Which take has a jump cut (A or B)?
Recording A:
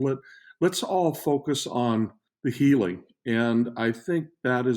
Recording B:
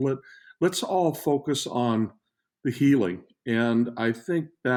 A